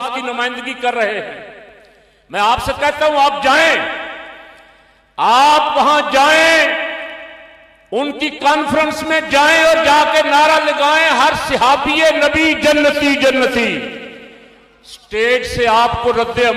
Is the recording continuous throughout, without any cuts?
yes; 0 cuts

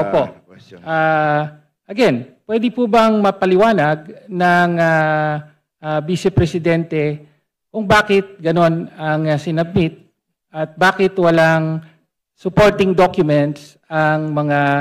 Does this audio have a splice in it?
no; 0 cuts

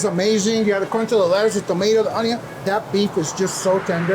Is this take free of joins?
yes; 0 cuts

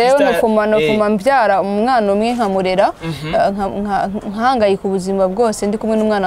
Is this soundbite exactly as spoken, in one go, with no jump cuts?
yes; 0 cuts

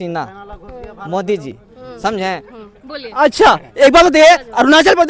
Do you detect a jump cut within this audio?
no; 0 cuts

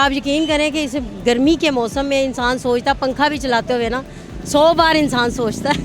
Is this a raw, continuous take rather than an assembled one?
yes; 0 cuts

